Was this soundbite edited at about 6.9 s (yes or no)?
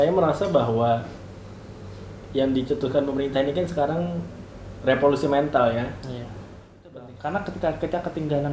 yes